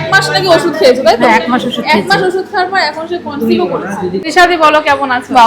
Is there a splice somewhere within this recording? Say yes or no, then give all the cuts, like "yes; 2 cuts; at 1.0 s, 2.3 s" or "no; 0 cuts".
yes; 1 cut; at 4.3 s